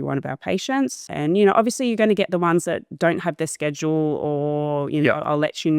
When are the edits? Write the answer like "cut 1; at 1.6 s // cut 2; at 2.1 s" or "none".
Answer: cut 1; at 1.1 s